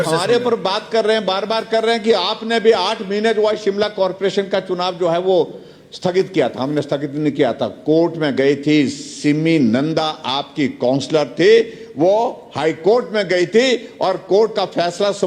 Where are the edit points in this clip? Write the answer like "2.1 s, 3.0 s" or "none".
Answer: none